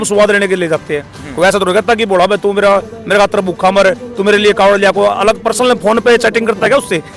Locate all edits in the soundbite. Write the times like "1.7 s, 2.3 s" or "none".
none